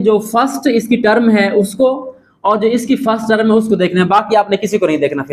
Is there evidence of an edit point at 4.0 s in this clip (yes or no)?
no